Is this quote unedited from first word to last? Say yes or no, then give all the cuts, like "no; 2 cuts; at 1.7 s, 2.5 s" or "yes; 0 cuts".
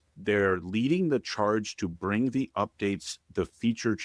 yes; 0 cuts